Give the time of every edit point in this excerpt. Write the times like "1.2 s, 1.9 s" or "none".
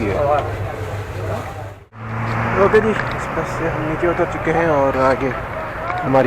2.1 s